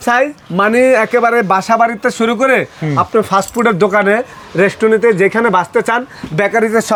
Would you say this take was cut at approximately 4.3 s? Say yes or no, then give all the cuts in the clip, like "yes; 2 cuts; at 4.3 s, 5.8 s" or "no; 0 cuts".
no; 0 cuts